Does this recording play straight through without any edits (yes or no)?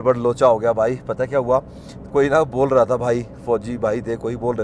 yes